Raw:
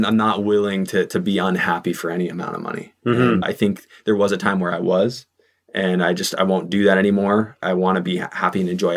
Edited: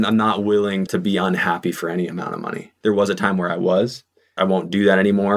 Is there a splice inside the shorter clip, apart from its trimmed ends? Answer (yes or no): yes